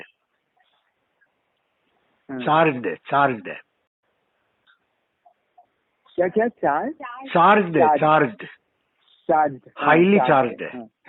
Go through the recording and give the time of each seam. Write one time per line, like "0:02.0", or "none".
none